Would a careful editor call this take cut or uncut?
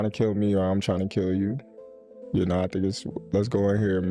uncut